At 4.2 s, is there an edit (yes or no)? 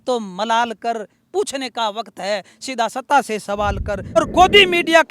yes